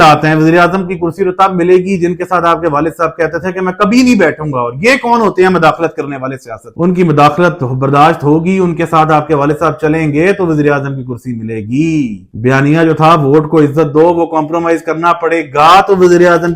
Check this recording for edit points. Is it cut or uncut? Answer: uncut